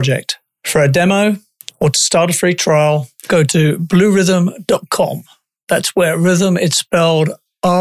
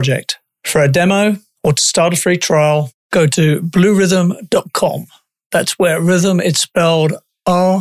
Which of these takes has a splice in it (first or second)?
second